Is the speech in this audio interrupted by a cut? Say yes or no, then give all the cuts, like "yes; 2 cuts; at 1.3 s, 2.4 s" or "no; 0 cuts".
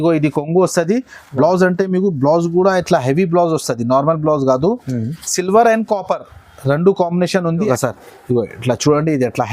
yes; 1 cut; at 7.7 s